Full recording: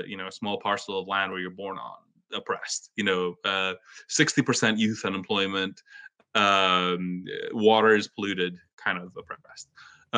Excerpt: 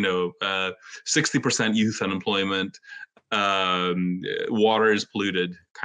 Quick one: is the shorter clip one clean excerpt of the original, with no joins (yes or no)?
yes